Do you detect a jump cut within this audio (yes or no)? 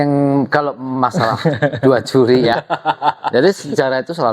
yes